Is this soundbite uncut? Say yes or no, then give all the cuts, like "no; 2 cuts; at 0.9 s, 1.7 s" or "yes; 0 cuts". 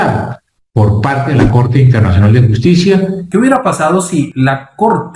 no; 2 cuts; at 3.2 s, 4.3 s